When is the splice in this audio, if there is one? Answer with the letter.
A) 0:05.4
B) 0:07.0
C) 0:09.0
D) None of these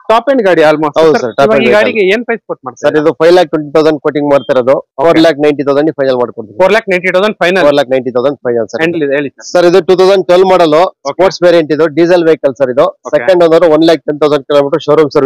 C